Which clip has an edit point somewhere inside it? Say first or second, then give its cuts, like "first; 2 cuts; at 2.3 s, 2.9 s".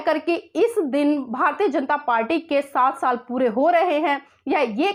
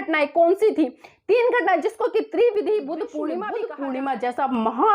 second; 1 cut; at 3.4 s